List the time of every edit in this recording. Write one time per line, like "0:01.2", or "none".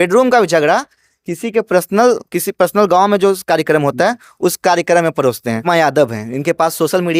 0:05.6